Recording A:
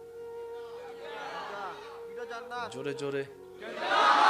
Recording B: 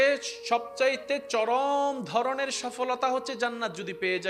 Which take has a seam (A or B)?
A